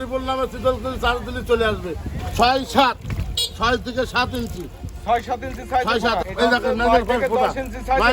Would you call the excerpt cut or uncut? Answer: cut